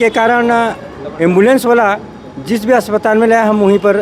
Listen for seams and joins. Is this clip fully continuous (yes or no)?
yes